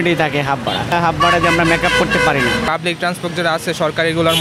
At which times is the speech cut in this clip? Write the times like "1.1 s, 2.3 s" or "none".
0.9 s, 2.7 s